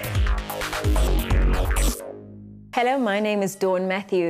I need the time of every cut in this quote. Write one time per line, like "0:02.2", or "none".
0:02.5